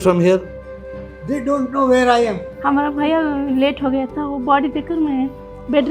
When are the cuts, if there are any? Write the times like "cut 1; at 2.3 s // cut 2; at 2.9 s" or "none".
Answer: cut 1; at 2.5 s